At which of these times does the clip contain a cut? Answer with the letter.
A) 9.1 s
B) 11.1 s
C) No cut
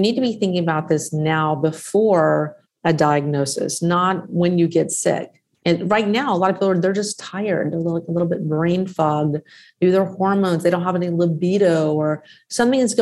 C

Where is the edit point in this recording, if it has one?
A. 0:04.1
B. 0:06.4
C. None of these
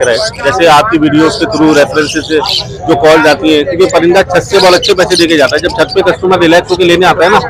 C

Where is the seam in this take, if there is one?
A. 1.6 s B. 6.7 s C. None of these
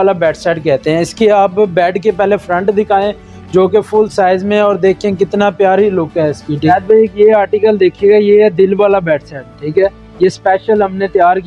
B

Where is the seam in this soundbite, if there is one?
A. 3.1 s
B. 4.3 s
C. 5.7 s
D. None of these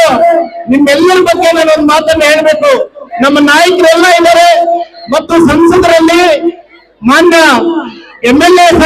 A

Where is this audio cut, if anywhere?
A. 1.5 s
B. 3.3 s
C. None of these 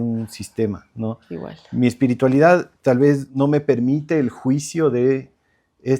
B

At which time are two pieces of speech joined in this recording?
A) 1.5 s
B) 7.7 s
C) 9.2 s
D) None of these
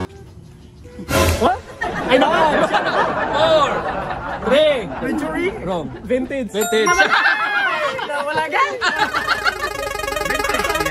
D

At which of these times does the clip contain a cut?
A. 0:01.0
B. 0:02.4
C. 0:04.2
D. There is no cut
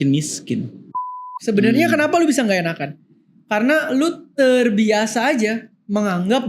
A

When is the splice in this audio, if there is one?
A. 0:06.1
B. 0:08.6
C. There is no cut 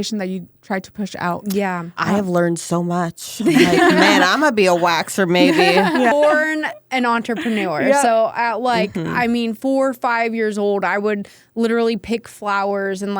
A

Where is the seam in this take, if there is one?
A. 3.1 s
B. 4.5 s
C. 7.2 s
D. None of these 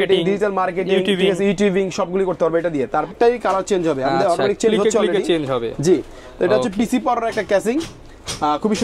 A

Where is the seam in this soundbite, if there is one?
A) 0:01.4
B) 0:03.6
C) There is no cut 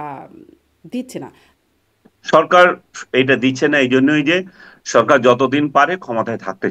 A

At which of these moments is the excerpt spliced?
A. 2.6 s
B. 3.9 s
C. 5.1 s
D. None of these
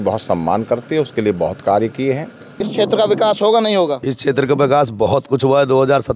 A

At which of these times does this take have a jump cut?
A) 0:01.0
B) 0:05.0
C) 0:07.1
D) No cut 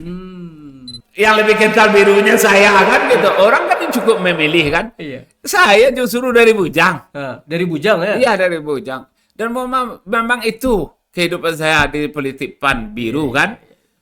A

